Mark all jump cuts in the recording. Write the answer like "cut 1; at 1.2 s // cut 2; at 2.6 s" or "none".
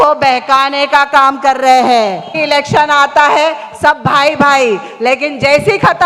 cut 1; at 2.4 s